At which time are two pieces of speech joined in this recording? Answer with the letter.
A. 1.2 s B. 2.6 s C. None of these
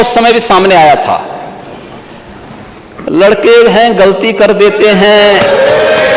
C